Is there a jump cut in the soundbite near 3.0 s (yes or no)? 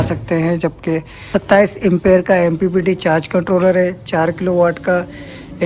no